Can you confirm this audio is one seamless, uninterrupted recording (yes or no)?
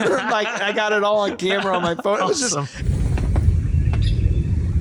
yes